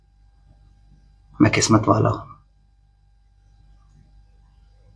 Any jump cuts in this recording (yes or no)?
no